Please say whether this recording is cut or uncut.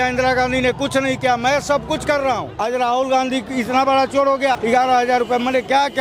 cut